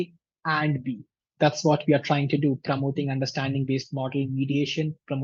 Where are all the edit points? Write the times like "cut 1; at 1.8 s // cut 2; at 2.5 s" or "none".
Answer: cut 1; at 1.2 s